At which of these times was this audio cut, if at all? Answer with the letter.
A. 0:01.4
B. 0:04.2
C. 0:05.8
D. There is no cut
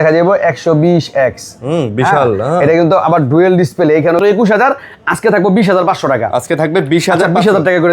B